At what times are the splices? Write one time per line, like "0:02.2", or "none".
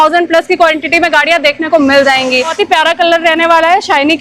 0:02.6